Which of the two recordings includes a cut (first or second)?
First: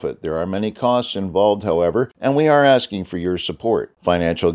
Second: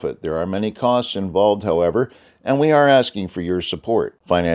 first